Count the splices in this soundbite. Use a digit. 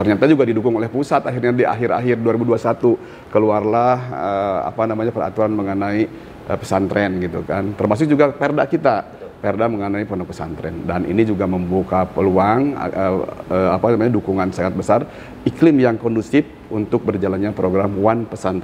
0